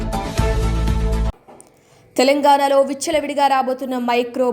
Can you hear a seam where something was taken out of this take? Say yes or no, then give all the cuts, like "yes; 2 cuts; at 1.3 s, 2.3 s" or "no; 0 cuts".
yes; 1 cut; at 1.3 s